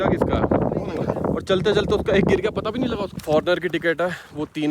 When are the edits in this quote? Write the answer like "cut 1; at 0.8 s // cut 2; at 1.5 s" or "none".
cut 1; at 3.2 s